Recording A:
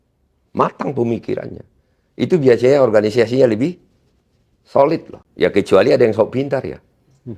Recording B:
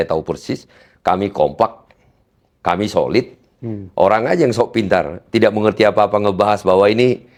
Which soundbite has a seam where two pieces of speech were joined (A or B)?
A